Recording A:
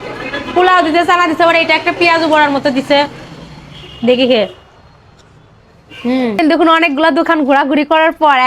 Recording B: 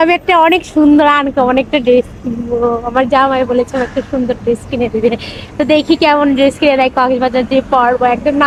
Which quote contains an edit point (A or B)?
A